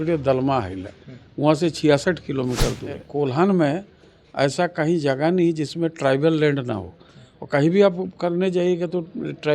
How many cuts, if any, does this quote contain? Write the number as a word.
one